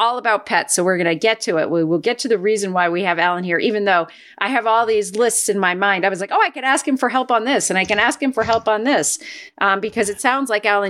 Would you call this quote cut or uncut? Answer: uncut